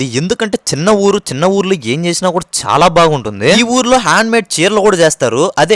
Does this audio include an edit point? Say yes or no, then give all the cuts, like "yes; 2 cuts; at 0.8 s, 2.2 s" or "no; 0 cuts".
no; 0 cuts